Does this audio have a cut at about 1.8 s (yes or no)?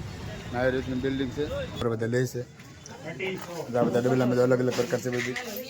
yes